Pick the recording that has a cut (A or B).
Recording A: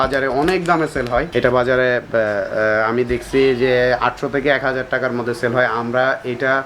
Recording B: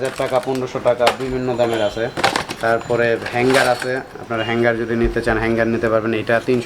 A